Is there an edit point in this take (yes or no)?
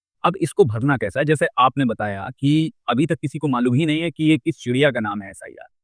no